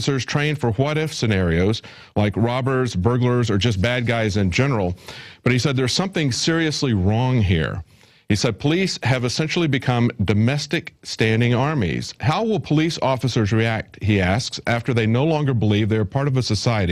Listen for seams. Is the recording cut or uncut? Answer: uncut